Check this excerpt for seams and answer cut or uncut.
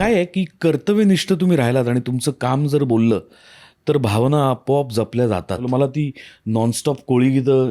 cut